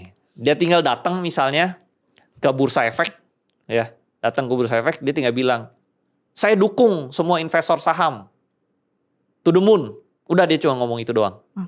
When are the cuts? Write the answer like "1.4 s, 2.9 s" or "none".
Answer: none